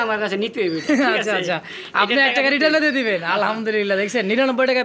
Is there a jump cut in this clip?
no; 0 cuts

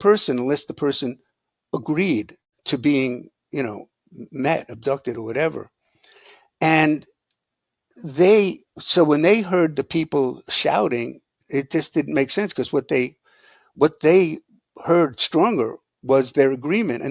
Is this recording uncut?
yes; 0 cuts

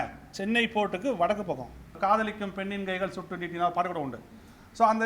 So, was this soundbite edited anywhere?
yes; 1 cut; at 1.9 s

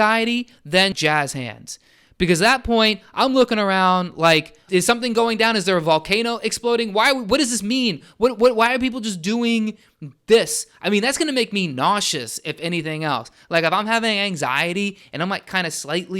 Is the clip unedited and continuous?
no; 2 cuts; at 0.9 s, 4.7 s

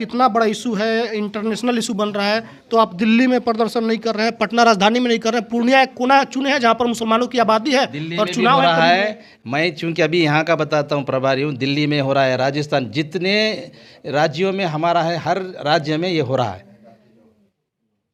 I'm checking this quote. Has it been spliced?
no; 0 cuts

